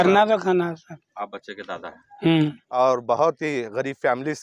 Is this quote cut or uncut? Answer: cut